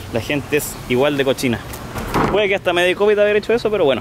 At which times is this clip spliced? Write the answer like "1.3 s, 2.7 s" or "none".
2.0 s